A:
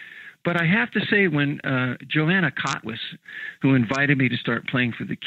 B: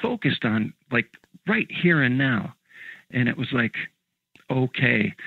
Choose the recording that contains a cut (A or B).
A